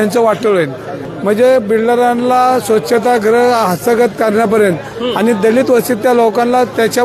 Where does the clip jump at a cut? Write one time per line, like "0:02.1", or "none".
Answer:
0:01.0